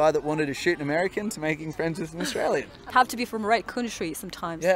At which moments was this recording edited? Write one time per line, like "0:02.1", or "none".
none